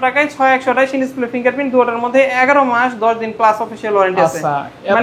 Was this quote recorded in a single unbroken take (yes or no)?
yes